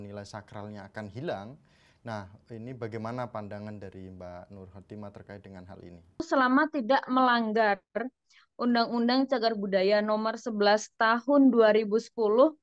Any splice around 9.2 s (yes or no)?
no